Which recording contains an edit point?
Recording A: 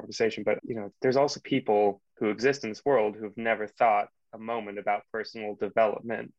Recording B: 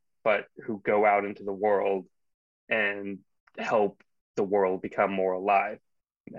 A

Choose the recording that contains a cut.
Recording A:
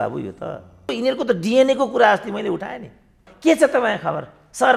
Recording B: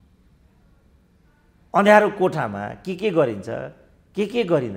A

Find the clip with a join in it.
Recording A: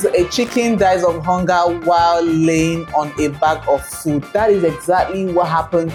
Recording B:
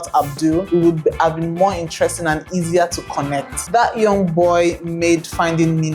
B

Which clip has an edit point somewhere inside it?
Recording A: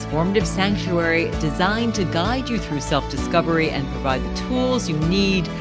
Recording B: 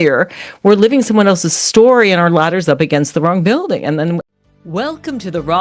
B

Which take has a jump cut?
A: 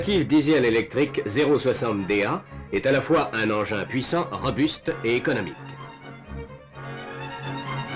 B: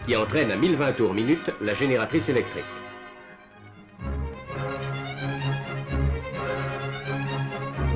B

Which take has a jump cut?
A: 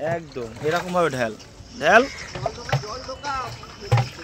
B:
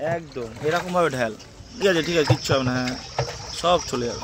B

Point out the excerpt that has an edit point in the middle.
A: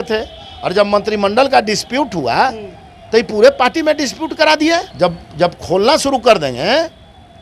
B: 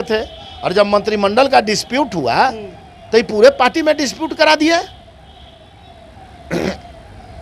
A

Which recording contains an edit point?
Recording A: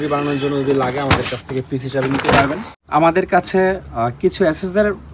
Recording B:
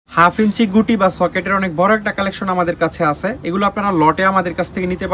A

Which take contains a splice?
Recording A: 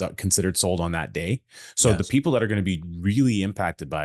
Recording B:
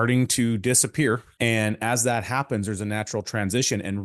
B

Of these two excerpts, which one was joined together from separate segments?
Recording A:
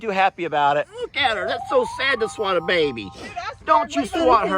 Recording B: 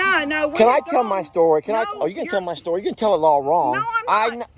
A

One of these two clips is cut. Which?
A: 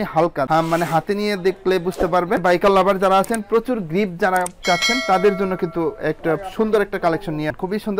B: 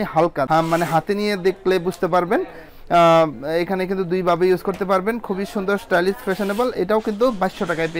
A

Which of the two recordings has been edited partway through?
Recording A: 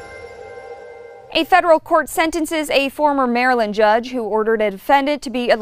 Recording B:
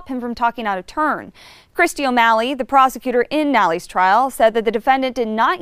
A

